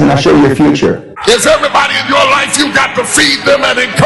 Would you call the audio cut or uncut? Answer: cut